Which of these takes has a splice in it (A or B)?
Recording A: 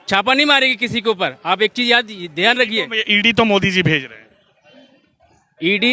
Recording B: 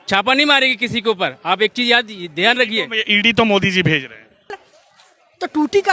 B